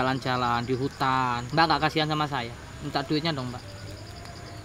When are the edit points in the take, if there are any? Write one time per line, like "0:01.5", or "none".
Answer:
0:01.4